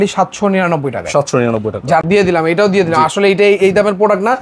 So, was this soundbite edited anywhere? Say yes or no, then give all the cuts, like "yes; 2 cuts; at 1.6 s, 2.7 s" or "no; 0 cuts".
yes; 1 cut; at 2.0 s